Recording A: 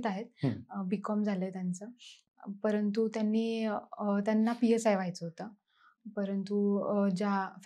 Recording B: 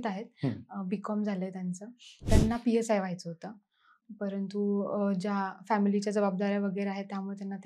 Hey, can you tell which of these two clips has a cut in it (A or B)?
B